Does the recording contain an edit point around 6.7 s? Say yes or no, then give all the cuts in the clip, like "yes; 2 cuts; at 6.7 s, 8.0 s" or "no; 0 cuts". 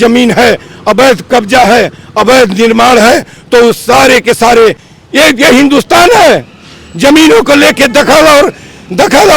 no; 1 cut; at 4.9 s